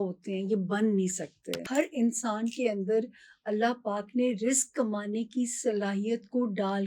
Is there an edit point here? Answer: yes; 1 cut; at 1.6 s

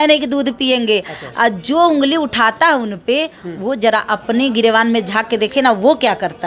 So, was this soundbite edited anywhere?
no; 0 cuts

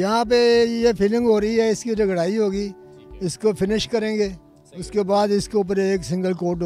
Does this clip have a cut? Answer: no; 0 cuts

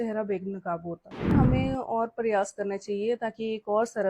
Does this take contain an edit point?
yes; 1 cut; at 1.3 s

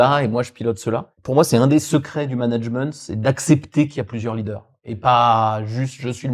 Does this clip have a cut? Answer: yes; 1 cut; at 1.1 s

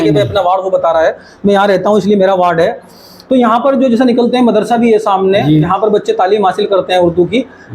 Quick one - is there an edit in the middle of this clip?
no; 0 cuts

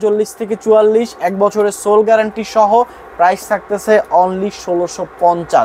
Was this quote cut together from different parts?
no; 0 cuts

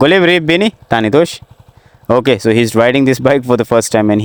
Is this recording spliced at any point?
no; 0 cuts

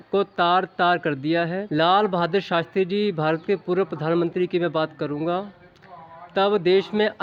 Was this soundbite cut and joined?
no; 0 cuts

